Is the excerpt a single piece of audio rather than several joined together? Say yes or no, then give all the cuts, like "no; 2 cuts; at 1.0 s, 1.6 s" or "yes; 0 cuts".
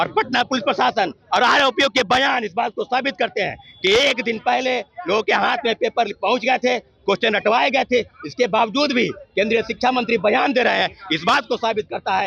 yes; 0 cuts